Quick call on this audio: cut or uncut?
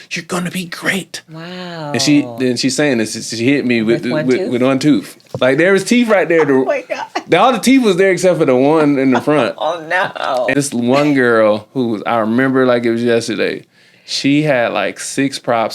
cut